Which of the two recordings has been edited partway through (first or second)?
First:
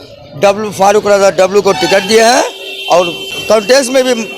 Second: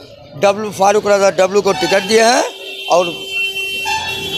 first